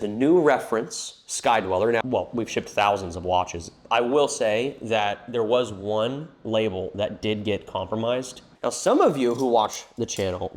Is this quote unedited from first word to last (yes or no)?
no